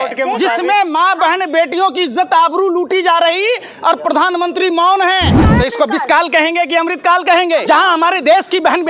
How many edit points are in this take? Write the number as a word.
two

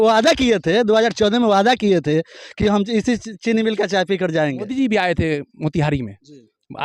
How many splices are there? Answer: one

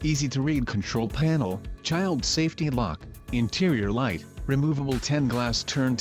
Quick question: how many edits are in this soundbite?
three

